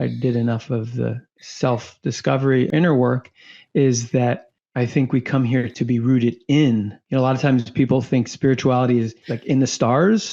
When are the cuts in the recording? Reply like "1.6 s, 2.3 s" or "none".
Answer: 9.3 s